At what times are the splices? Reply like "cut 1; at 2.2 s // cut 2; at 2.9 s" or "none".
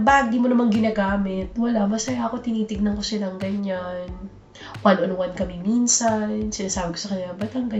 none